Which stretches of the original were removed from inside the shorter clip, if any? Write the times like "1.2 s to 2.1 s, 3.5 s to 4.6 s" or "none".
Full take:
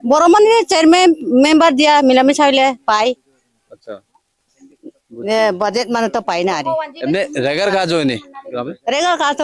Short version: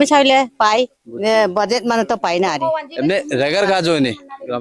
3.3 s to 5.1 s